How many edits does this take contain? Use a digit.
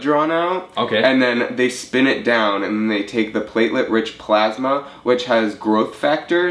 0